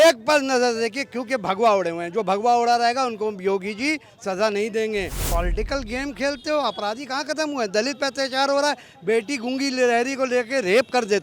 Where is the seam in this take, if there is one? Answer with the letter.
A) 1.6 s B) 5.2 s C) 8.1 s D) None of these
B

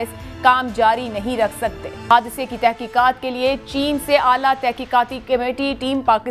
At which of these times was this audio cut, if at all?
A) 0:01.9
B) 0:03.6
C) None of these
A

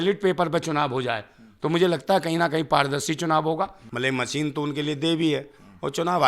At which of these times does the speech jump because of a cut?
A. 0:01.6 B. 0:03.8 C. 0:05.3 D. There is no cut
B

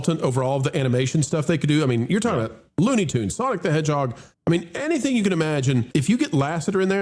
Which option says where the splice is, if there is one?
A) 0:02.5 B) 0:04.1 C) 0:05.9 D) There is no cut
C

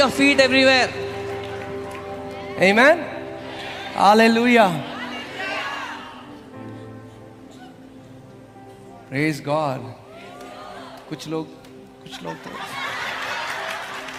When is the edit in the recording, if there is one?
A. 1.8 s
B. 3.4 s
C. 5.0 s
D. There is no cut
D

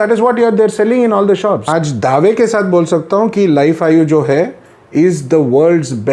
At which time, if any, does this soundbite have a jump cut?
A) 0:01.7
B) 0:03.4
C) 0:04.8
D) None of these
A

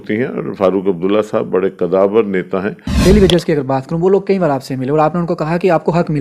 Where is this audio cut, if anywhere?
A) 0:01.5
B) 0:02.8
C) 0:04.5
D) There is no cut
B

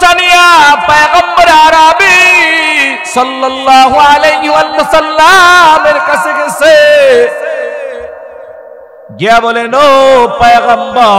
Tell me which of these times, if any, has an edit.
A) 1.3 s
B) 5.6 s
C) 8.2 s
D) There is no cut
D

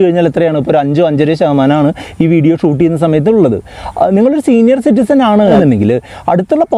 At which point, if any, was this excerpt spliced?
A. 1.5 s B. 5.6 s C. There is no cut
B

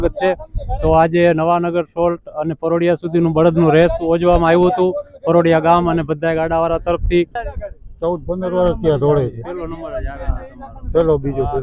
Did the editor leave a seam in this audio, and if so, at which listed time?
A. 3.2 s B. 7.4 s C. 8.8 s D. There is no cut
B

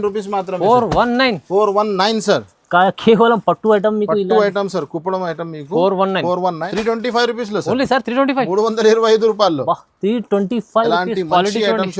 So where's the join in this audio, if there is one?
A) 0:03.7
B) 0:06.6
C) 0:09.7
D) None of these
B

